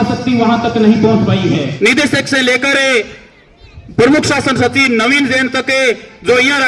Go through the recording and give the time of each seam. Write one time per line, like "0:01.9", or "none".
0:01.7